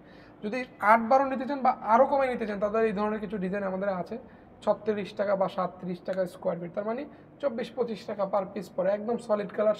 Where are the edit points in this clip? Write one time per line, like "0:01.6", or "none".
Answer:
none